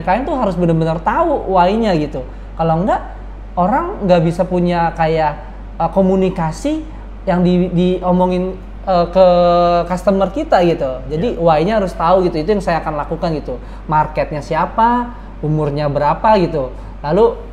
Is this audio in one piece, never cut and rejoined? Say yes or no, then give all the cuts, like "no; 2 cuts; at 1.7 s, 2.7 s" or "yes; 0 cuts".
yes; 0 cuts